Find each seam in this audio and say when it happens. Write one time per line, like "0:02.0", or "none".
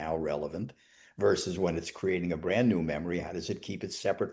none